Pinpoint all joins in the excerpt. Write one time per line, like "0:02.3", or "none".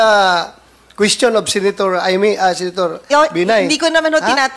none